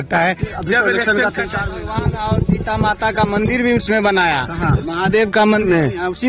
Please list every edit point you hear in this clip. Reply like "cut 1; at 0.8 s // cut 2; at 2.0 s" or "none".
cut 1; at 1.6 s